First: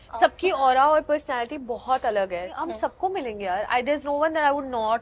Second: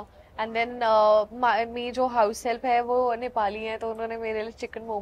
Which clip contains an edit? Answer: first; 1 cut; at 2.5 s

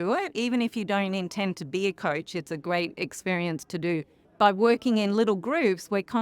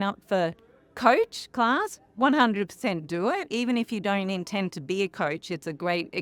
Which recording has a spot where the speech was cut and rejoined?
first; 1 cut; at 4.2 s

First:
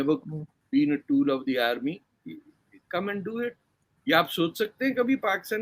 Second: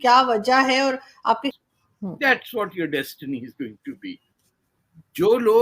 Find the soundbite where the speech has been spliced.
second; 1 cut; at 1.5 s

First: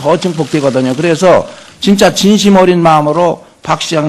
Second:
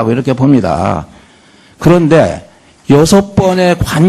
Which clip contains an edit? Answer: first; 1 cut; at 1.1 s

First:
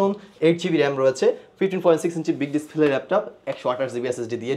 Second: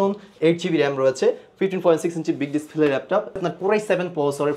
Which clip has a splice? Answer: second; 1 cut; at 3.4 s

